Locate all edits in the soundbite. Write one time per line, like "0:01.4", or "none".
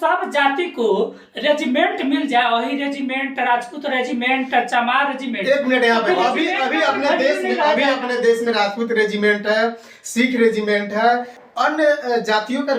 0:11.4